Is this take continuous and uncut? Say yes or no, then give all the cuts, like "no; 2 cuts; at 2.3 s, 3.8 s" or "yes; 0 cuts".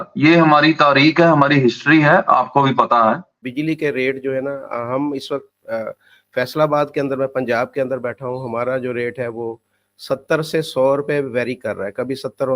no; 1 cut; at 3.4 s